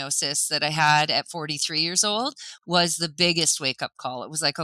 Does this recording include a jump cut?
no; 0 cuts

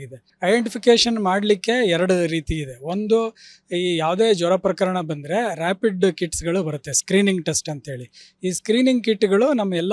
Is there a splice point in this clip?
no; 0 cuts

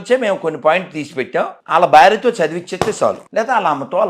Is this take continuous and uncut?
no; 2 cuts; at 1.6 s, 3.2 s

